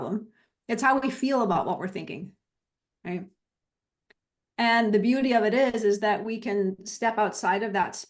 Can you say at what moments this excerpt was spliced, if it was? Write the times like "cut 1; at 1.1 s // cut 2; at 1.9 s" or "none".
none